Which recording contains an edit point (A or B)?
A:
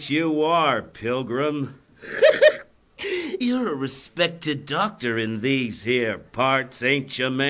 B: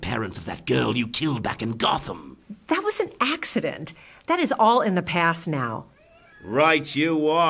B